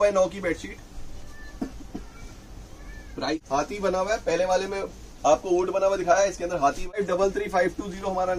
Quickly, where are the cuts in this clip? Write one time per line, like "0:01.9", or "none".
0:03.4
0:07.0